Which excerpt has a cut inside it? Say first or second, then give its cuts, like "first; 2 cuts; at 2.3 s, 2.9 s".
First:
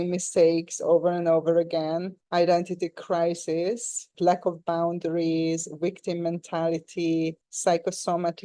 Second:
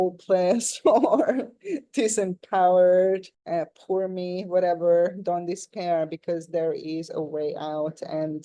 first; 1 cut; at 4.1 s